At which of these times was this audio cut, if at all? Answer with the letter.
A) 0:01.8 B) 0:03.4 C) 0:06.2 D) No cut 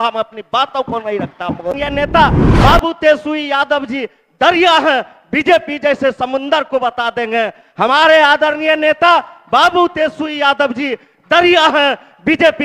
A